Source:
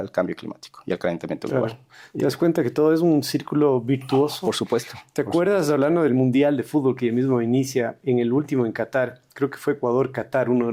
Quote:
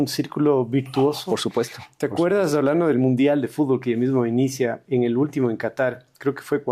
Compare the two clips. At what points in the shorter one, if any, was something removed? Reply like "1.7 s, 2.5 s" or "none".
none